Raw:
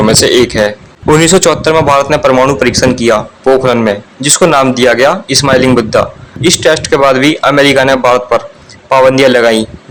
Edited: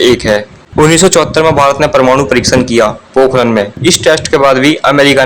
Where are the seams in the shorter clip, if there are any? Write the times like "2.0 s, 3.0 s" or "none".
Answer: 3.7 s